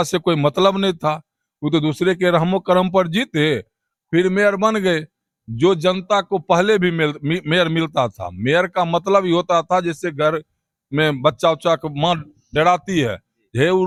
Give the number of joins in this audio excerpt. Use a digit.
0